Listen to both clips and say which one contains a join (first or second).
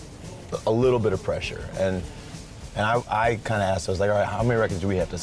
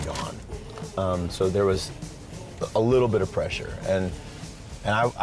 first